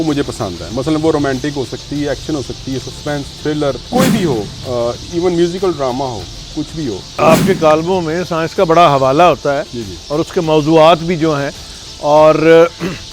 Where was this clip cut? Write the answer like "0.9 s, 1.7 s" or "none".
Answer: 3.8 s, 7.2 s